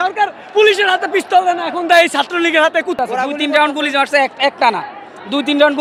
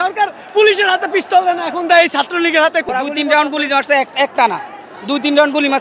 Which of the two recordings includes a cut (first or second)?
second